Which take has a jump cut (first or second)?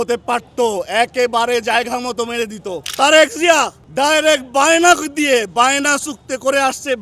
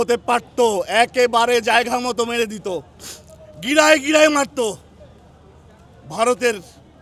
first